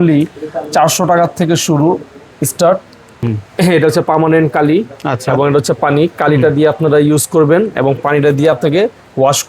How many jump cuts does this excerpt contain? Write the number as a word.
one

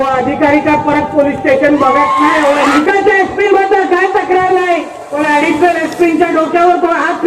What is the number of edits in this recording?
two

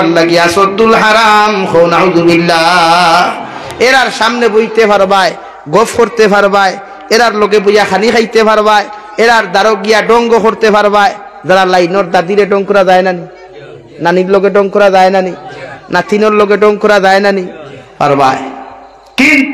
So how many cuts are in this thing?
zero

